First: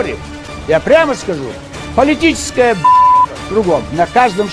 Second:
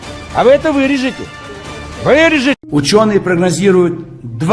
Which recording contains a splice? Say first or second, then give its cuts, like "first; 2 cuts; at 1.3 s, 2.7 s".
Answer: second; 1 cut; at 2.6 s